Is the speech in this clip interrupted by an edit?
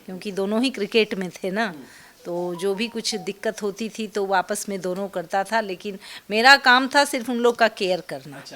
no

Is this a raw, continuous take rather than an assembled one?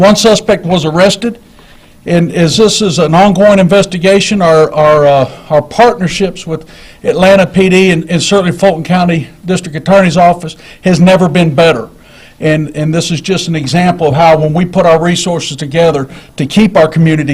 no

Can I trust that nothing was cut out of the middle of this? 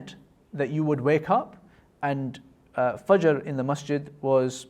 yes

